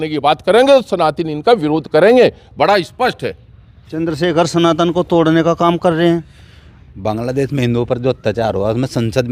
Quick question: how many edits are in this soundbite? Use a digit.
0